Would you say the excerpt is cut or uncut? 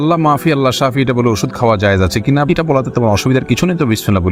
uncut